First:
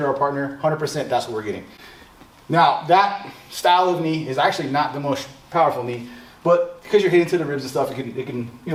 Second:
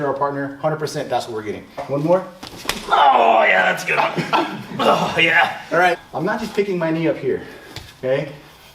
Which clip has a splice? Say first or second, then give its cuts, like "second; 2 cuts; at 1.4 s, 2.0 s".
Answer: second; 2 cuts; at 1.8 s, 6.0 s